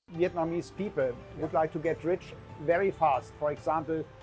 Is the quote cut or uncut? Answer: uncut